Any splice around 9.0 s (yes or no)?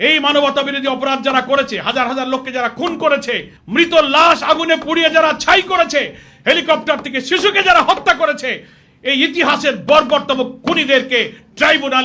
no